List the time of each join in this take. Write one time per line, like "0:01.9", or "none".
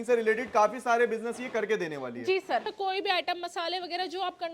0:02.7

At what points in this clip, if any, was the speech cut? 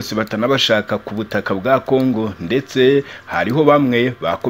none

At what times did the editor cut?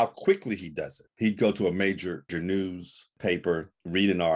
0:01.1
0:02.3

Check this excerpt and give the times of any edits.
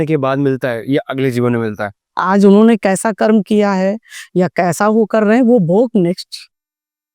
0:02.0

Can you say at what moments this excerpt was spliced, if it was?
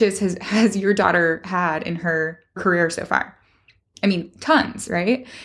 0:02.6

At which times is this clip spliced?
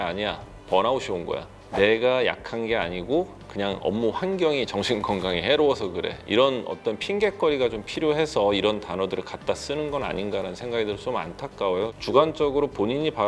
none

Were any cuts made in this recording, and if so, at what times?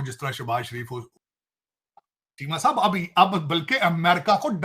0:01.2

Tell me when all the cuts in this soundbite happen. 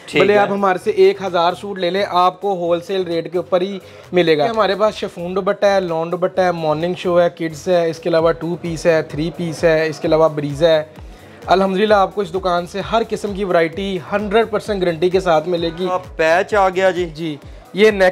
0:04.5
0:16.0

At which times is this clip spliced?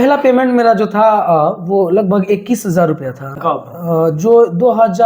0:03.4

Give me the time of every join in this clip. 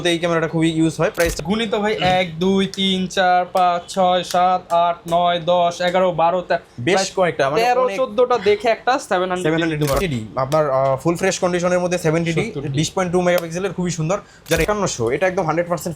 0:01.3
0:10.0
0:14.7

